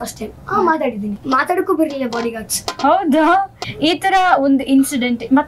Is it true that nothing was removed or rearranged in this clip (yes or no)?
no